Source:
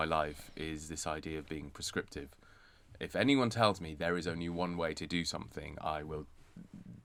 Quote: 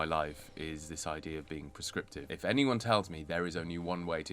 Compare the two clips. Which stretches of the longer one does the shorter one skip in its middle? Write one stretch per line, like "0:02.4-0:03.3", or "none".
0:02.2-0:03.0